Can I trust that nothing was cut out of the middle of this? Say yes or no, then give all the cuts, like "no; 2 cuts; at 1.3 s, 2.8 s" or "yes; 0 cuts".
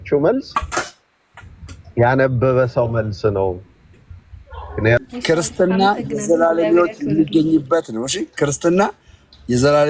no; 1 cut; at 5.0 s